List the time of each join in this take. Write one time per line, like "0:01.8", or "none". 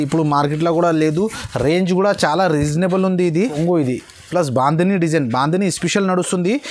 0:03.6